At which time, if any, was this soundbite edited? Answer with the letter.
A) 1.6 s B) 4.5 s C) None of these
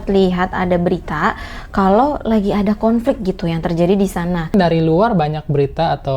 B